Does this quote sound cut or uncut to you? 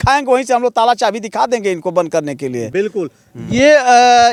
uncut